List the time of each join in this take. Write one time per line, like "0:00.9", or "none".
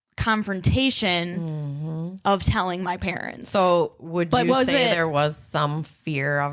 none